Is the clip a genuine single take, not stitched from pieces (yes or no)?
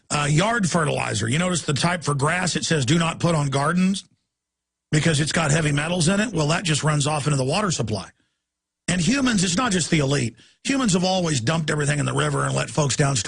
no